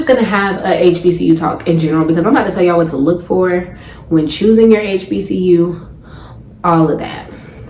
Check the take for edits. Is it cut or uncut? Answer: uncut